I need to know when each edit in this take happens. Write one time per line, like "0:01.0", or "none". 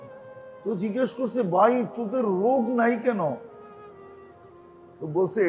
0:03.4
0:04.8